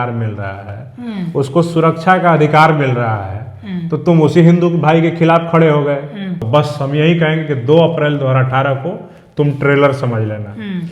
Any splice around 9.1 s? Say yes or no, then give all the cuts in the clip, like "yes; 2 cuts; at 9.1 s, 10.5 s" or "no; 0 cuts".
no; 1 cut; at 6.4 s